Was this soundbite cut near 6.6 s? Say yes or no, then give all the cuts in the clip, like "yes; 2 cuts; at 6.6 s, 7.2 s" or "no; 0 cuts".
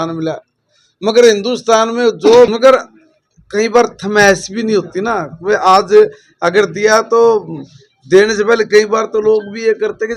no; 1 cut; at 2.5 s